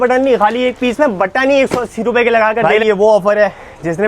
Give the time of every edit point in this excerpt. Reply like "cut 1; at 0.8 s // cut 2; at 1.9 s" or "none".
cut 1; at 2.7 s